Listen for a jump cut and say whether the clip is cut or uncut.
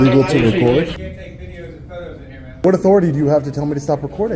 cut